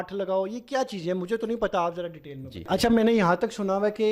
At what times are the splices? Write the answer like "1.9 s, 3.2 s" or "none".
2.7 s